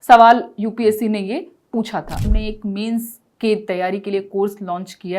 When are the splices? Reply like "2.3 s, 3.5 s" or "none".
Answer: 2.2 s